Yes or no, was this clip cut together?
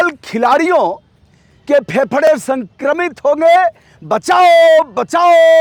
no